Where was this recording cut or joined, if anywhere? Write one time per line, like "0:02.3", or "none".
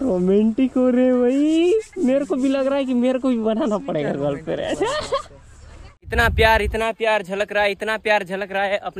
0:06.0